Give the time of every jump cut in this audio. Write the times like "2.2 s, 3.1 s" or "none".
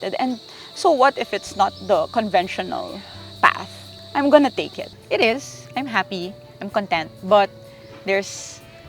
4.8 s